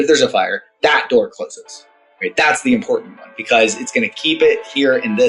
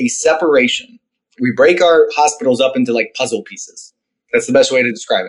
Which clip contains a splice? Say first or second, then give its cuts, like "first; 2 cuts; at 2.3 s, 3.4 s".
second; 1 cut; at 1.3 s